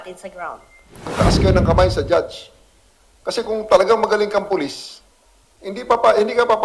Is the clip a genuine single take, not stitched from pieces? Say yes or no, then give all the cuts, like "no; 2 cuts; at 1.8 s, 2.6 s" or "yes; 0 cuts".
no; 1 cut; at 1.1 s